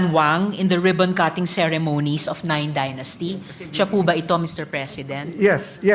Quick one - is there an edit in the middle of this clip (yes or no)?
no